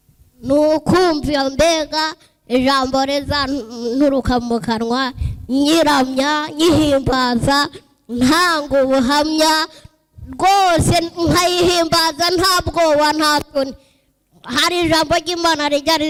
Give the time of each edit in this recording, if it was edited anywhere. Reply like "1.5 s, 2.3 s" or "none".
none